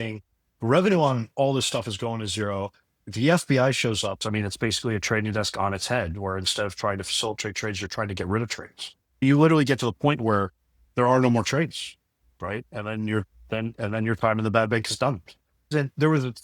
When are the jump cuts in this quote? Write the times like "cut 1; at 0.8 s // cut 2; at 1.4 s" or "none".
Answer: cut 1; at 4.2 s // cut 2; at 9.2 s // cut 3; at 15.7 s